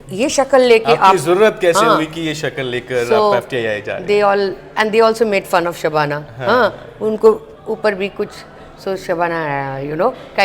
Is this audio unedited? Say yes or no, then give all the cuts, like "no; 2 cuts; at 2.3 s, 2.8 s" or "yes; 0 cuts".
yes; 0 cuts